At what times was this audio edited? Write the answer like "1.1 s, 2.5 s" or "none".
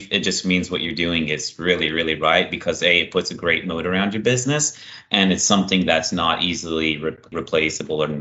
7.3 s